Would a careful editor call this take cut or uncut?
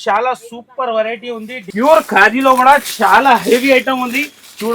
cut